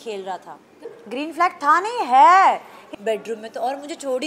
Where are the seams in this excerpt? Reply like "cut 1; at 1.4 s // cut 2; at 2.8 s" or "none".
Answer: cut 1; at 0.9 s // cut 2; at 2.8 s